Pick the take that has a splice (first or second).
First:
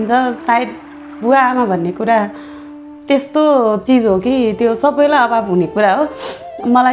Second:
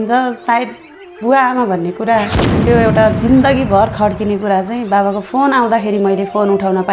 second